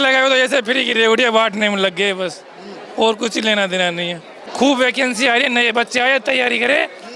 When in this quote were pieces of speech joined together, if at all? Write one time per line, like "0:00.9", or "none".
0:04.4